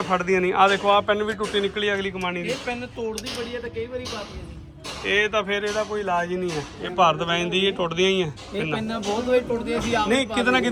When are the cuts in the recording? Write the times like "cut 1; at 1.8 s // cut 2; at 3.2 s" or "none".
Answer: none